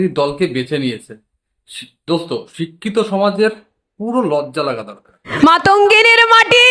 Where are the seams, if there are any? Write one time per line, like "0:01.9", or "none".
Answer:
0:04.9